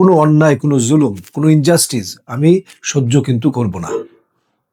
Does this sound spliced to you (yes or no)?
no